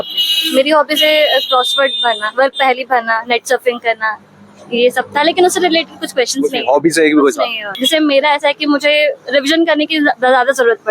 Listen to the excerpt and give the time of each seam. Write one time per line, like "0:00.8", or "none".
0:07.7